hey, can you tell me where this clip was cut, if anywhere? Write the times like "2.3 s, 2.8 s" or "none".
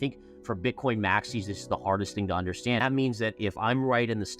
2.8 s

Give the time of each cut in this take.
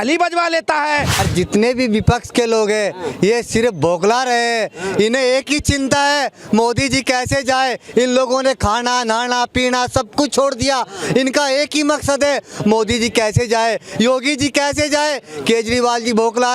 1.2 s

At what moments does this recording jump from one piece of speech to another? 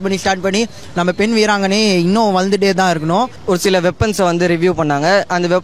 3.4 s

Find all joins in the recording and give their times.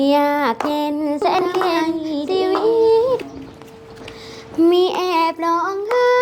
3.2 s

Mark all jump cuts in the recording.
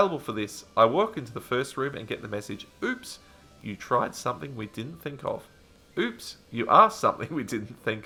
none

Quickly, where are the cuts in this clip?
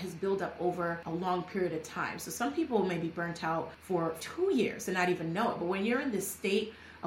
1.0 s, 4.0 s

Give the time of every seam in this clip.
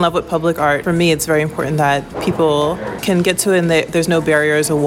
2.2 s

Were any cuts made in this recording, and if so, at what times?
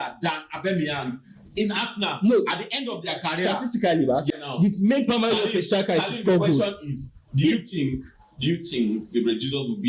4.4 s

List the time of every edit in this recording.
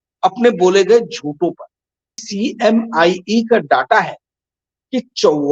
2.2 s

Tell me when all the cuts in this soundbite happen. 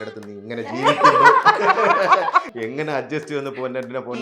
2.5 s

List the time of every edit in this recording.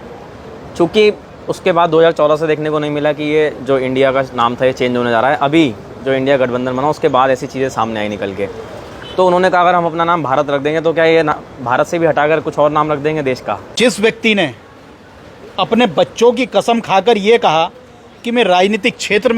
13.6 s

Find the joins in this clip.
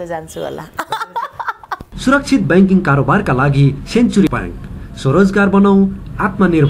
1.9 s

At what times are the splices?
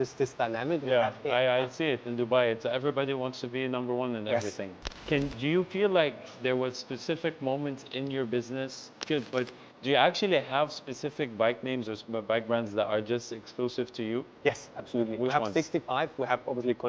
4.8 s, 9.0 s

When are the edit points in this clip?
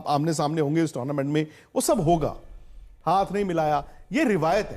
2.9 s

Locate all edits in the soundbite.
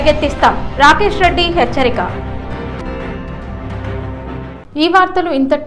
none

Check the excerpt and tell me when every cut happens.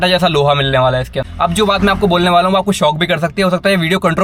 1.2 s

